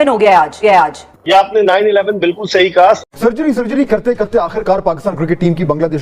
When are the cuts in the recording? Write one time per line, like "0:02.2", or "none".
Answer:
0:03.0